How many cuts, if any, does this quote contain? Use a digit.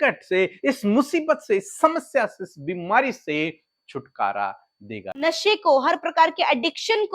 1